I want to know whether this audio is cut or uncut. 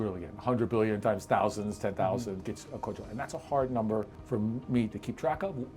cut